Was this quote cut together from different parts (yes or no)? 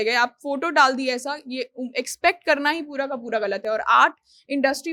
no